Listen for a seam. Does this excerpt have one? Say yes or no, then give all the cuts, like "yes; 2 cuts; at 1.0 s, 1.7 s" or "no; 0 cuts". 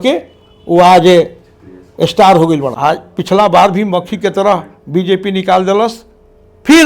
yes; 1 cut; at 2.7 s